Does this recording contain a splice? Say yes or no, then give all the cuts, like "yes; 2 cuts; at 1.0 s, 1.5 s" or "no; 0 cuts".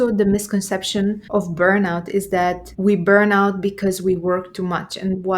yes; 2 cuts; at 1.2 s, 2.7 s